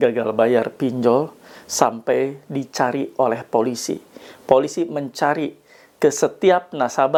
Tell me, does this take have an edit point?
no; 0 cuts

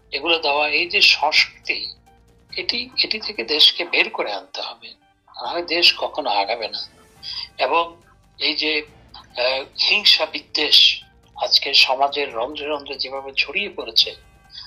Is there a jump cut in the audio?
no; 0 cuts

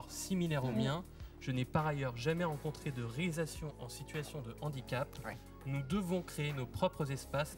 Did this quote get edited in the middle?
no; 0 cuts

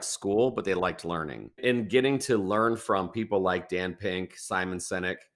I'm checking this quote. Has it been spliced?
yes; 1 cut; at 1.6 s

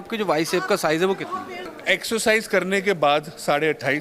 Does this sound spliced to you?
yes; 1 cut; at 1.8 s

